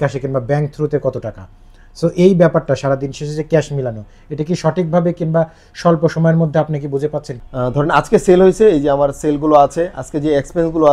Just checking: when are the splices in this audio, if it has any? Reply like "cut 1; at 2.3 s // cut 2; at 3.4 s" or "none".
cut 1; at 7.4 s